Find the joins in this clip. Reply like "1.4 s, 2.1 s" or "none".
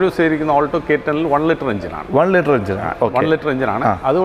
none